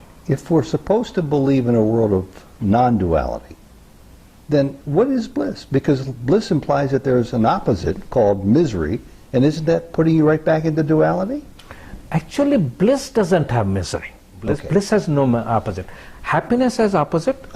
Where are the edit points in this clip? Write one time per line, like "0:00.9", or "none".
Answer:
0:14.5